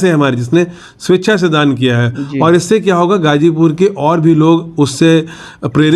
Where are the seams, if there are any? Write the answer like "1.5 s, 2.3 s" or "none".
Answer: none